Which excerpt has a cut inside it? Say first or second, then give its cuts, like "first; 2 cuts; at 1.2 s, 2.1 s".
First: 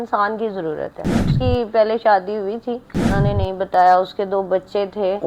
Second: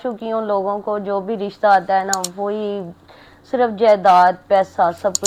first; 2 cuts; at 1.3 s, 3.2 s